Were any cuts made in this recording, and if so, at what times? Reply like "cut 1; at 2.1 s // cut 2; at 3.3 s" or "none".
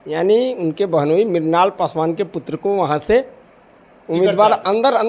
none